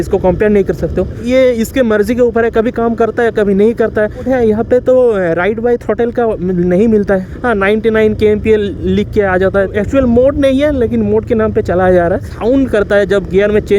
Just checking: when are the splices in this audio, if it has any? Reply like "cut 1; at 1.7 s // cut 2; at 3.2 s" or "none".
cut 1; at 1.2 s // cut 2; at 4.3 s // cut 3; at 7.3 s // cut 4; at 9.7 s // cut 5; at 12.3 s